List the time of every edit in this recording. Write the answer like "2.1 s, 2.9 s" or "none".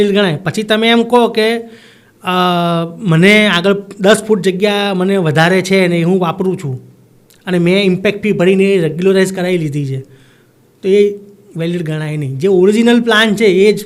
none